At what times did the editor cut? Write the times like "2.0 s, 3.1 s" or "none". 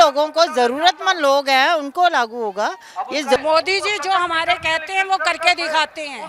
3.4 s